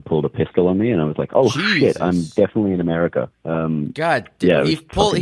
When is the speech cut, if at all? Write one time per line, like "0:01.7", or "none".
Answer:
0:03.4